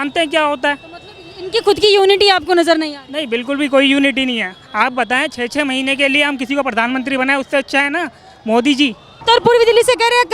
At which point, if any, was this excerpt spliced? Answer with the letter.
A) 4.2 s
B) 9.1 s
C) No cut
B